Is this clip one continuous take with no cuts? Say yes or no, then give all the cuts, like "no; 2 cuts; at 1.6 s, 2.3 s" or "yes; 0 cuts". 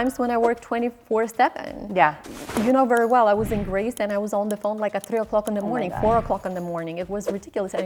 yes; 0 cuts